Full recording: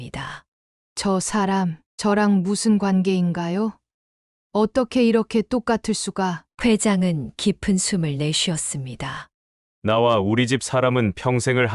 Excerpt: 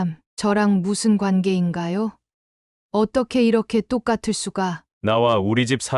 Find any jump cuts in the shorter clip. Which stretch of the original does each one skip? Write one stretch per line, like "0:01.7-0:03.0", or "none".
0:06.5-0:09.7